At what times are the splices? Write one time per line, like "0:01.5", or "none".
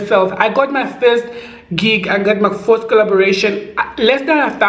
none